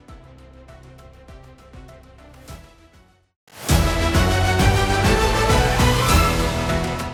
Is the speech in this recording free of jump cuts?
yes; 0 cuts

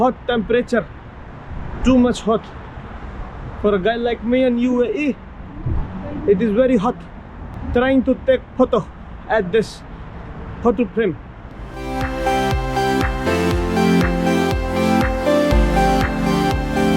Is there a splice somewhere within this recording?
no; 0 cuts

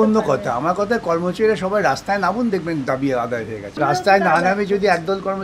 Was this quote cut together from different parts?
yes; 1 cut; at 3.7 s

